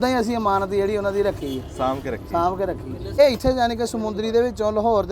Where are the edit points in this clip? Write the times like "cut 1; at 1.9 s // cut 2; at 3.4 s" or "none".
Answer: cut 1; at 3.2 s